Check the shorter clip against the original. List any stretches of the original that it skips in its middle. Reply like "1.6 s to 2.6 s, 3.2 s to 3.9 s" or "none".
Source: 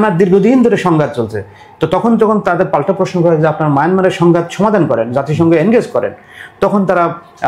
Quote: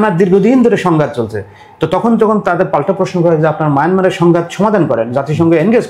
none